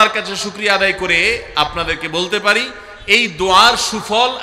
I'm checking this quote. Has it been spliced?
no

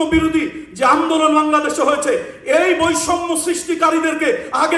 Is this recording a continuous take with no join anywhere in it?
yes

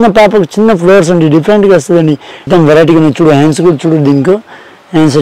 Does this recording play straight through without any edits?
no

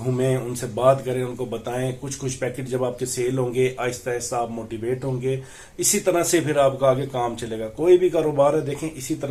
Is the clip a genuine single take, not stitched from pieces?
yes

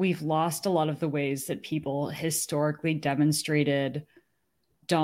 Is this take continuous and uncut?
yes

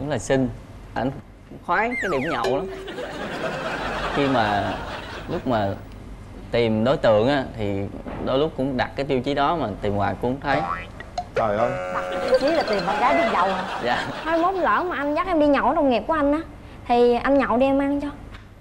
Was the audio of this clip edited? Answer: no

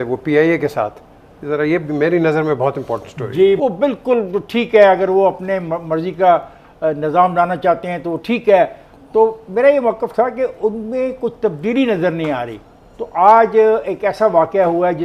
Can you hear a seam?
no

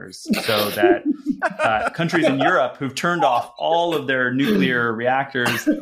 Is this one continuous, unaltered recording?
yes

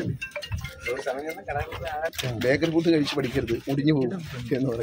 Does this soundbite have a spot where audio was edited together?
yes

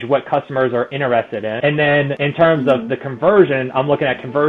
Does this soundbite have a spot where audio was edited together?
yes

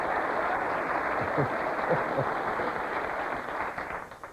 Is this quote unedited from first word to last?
yes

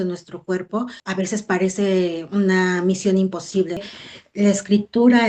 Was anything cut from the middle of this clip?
yes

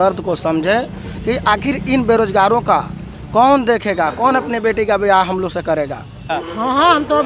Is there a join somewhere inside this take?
yes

